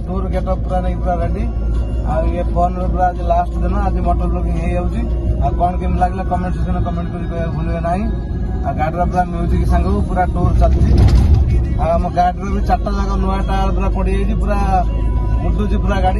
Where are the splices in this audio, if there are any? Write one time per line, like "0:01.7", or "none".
none